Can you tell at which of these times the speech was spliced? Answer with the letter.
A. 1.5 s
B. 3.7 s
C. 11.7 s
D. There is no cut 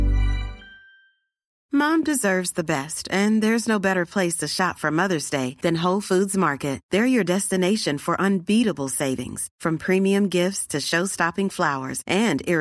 A